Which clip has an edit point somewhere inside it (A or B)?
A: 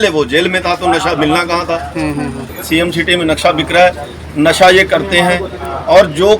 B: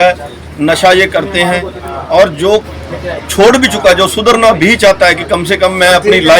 A